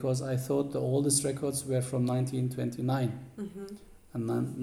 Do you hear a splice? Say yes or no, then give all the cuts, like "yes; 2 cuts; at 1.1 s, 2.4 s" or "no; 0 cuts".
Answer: no; 0 cuts